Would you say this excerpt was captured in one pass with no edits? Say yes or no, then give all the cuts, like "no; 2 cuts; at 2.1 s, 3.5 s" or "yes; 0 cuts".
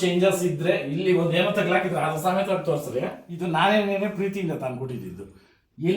no; 1 cut; at 3.2 s